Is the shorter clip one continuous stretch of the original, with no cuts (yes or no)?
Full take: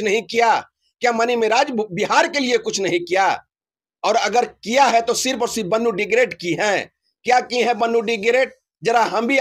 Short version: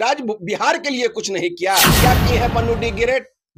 no